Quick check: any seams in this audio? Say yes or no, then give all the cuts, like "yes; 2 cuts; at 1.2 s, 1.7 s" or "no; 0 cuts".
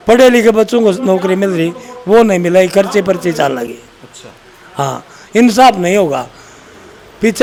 no; 0 cuts